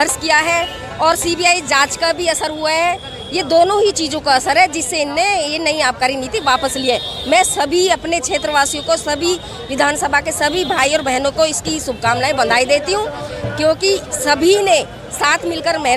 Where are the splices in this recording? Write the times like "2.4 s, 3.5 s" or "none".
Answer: none